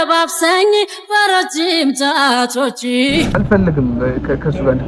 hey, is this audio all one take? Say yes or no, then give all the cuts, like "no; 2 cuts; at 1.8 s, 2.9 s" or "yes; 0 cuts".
no; 1 cut; at 3.4 s